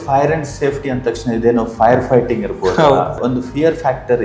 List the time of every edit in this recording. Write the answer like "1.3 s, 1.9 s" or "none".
3.2 s